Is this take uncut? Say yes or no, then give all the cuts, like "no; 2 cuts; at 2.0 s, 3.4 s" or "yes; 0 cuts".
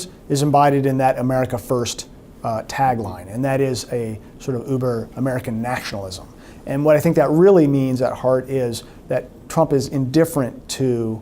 yes; 0 cuts